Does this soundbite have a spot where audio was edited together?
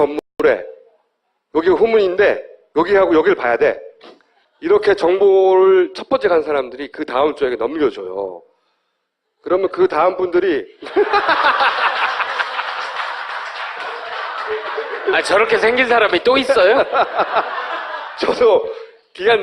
yes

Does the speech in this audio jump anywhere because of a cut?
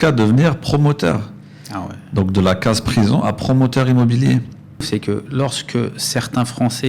yes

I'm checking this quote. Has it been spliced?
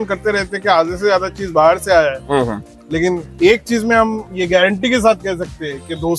no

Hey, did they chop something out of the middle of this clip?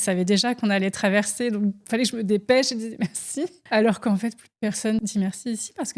yes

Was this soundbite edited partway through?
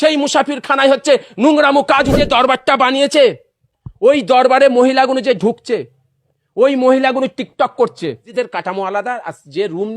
yes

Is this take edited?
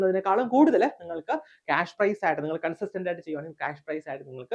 no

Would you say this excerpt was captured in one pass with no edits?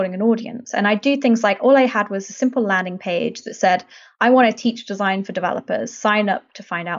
yes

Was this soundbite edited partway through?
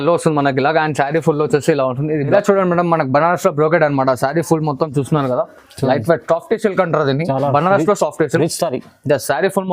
yes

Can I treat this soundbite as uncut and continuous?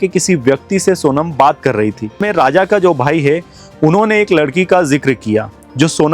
no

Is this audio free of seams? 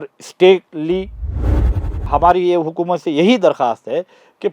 no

